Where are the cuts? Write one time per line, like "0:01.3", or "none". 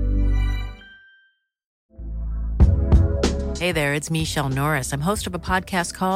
0:01.9